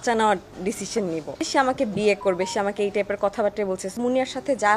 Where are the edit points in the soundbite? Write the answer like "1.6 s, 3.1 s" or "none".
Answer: 1.4 s, 3.9 s